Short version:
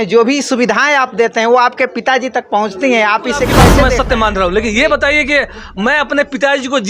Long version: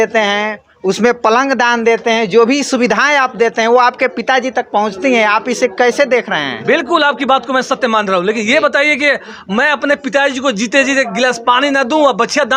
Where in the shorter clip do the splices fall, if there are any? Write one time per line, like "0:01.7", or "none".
0:03.8